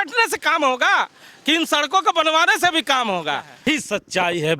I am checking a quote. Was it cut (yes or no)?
yes